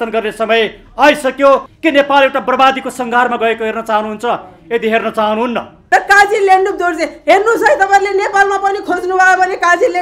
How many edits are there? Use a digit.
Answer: 2